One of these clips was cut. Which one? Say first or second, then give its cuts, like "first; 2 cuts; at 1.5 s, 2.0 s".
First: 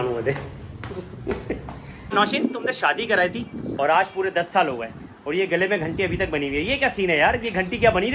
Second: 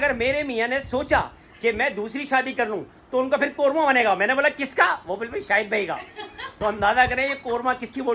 first; 1 cut; at 2.1 s